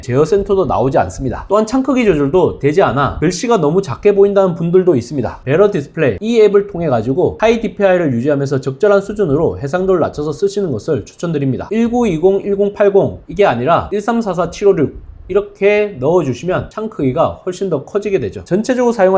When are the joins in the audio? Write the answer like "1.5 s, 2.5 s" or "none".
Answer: none